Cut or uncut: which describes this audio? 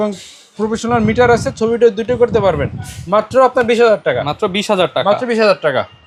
uncut